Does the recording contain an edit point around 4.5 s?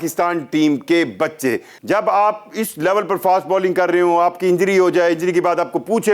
no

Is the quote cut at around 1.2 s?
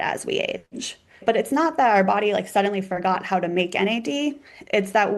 yes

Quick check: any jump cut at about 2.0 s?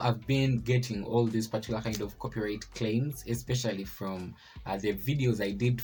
no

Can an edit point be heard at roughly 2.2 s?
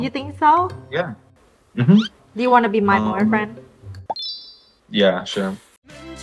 yes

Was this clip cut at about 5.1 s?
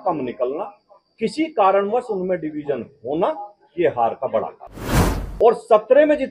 yes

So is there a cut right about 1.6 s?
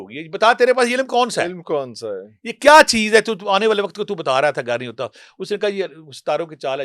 no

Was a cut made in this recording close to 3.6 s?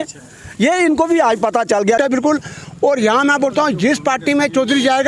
no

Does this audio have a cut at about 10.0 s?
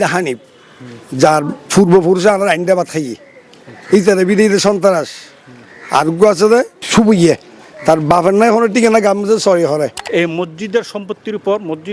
yes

